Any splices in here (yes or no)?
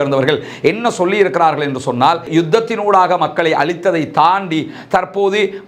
yes